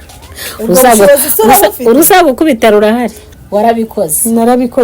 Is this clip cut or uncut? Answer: cut